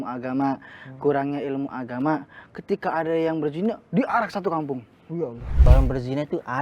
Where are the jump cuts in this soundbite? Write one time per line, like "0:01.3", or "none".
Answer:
0:05.7